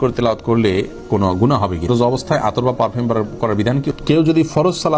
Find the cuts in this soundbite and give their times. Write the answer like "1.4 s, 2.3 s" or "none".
1.9 s, 3.9 s